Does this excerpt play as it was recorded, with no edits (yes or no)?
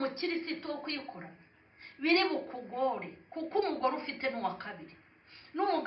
yes